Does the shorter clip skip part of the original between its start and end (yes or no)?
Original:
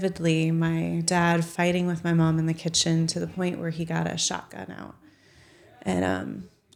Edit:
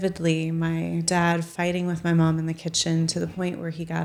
no